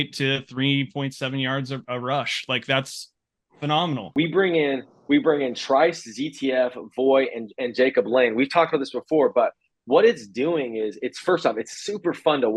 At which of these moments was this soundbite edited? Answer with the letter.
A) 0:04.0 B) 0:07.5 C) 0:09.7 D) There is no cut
A